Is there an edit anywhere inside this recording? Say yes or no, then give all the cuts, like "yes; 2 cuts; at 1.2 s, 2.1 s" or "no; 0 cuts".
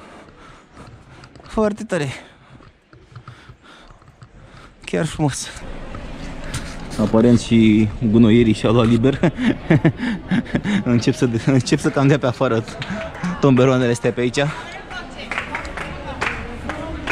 yes; 1 cut; at 5.6 s